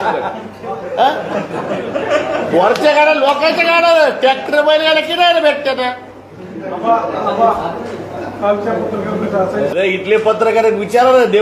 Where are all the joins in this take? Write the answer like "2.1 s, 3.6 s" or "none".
9.7 s